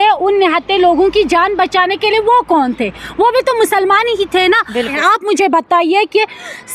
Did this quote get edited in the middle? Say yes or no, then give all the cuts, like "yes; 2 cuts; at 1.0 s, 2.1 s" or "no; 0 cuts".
yes; 1 cut; at 4.9 s